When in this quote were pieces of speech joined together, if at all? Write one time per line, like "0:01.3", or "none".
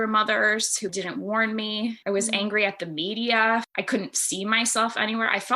0:02.0
0:03.7